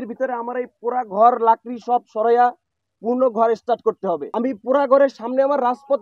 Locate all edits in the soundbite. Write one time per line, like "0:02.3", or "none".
0:04.3